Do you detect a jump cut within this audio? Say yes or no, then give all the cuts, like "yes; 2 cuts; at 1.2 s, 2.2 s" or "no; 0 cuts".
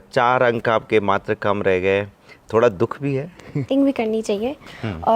yes; 1 cut; at 3.7 s